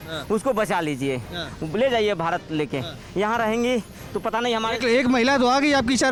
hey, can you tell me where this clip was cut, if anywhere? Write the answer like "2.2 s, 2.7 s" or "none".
none